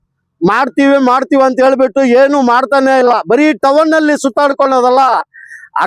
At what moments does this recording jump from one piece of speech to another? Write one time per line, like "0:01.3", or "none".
none